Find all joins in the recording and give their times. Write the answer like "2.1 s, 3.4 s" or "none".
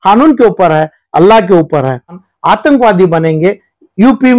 2.2 s